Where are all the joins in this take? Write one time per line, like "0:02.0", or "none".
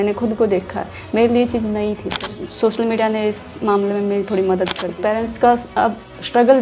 0:02.4
0:04.8